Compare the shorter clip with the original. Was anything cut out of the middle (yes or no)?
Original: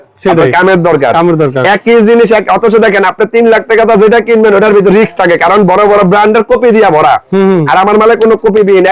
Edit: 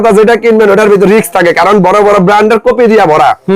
no